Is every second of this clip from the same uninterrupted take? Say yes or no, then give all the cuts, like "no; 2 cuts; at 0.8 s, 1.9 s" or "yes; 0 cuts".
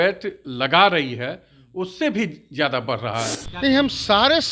no; 1 cut; at 3.4 s